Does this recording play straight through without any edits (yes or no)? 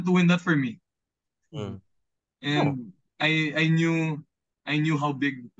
yes